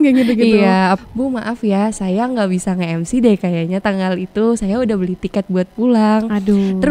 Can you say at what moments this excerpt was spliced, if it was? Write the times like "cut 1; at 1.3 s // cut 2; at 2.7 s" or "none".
cut 1; at 1.0 s